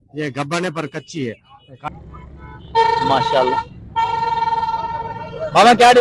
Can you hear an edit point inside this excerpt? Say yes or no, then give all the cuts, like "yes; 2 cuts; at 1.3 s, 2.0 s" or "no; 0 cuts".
yes; 1 cut; at 1.9 s